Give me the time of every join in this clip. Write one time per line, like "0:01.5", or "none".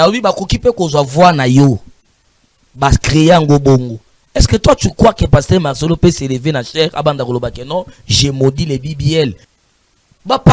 0:09.5